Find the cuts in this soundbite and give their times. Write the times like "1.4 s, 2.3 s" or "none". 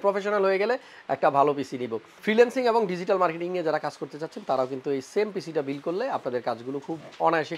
2.2 s